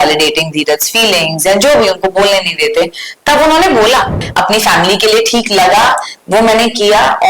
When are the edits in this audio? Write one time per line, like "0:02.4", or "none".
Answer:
0:04.2